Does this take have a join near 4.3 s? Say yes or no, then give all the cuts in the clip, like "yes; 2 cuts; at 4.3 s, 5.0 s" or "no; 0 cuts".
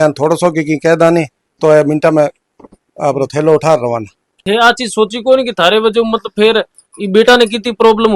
yes; 2 cuts; at 1.4 s, 4.3 s